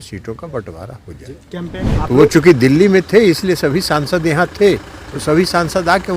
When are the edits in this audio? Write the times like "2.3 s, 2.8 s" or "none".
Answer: 1.8 s